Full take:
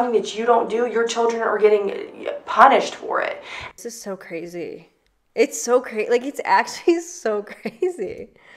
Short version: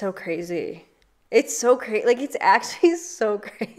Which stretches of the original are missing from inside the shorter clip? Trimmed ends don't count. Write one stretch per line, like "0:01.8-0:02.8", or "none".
none